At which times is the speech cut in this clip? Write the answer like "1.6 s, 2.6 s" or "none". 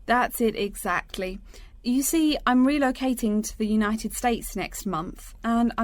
none